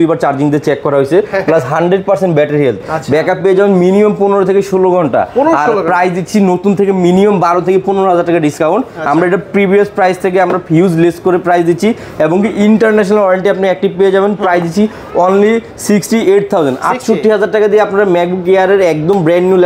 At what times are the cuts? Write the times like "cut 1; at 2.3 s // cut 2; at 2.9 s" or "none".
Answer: none

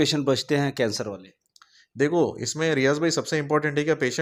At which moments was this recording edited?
none

